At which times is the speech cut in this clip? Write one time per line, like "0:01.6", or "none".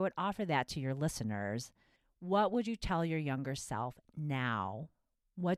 none